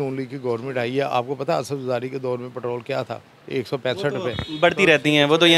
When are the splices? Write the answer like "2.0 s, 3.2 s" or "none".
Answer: none